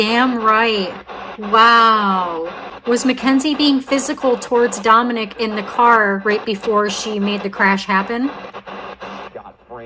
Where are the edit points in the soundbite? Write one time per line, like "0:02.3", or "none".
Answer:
0:02.6
0:08.5